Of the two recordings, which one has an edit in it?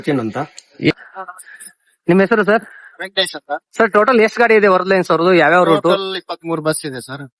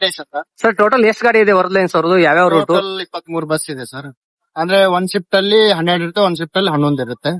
first; 1 cut; at 0.9 s

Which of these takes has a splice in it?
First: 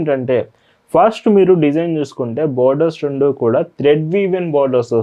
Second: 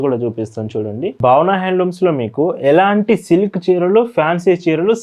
second; 1 cut; at 1.1 s

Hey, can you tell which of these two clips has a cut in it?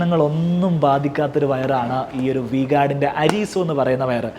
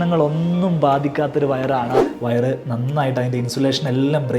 second; 1 cut; at 2.1 s

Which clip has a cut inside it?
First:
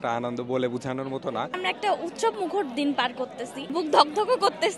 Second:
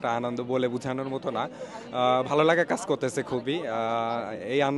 first; 2 cuts; at 1.5 s, 3.7 s

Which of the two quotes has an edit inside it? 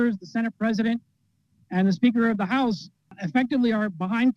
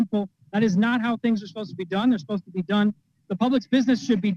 first; 1 cut; at 3.1 s

